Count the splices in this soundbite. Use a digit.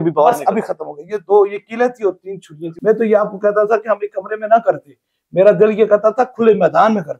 1